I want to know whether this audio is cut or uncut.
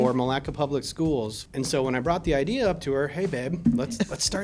cut